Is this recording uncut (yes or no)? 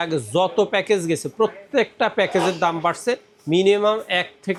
yes